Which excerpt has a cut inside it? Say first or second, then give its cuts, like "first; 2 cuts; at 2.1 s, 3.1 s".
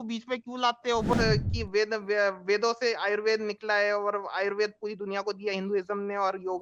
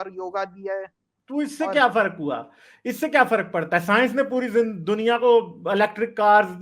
first; 1 cut; at 1.1 s